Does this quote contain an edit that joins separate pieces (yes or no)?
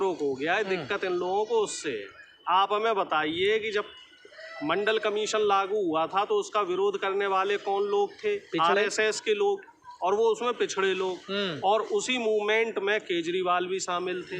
no